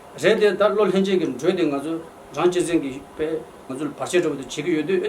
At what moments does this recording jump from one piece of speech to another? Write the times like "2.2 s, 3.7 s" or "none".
3.7 s